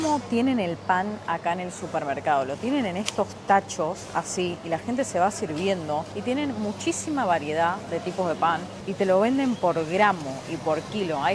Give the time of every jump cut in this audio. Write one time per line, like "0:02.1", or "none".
none